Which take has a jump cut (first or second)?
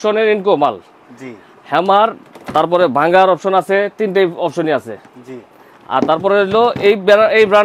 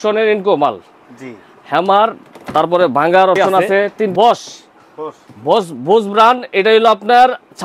second